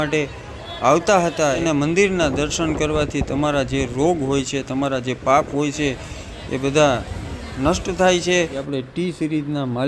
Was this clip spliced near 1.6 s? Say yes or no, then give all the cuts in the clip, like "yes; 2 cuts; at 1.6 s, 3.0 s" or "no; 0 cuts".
yes; 2 cuts; at 1.6 s, 8.6 s